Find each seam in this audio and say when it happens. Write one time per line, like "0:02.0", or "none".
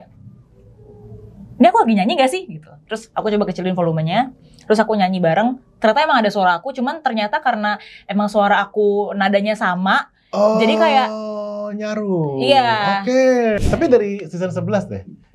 0:13.6

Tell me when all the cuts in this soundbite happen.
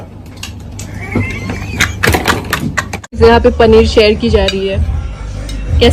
0:03.0

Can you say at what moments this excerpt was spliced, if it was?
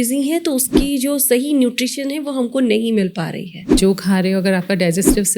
0:03.7

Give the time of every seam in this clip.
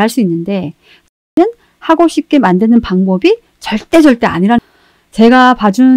0:01.2
0:04.7

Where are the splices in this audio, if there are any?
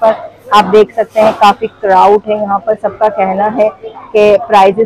none

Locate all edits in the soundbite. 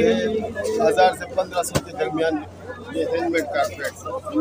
0:02.5

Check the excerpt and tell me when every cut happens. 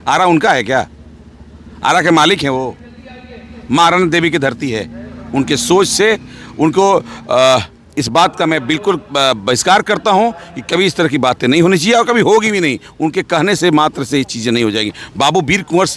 none

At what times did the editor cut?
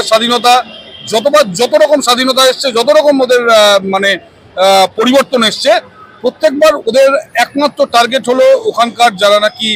none

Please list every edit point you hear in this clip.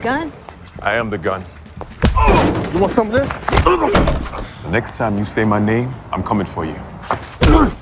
none

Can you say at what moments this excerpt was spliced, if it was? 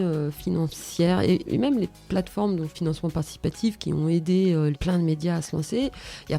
0:01.4
0:02.7
0:04.8

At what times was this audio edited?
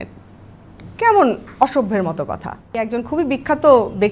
0:02.8

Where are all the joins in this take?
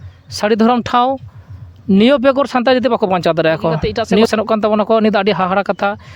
0:04.3

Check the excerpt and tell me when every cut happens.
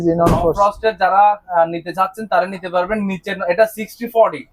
none

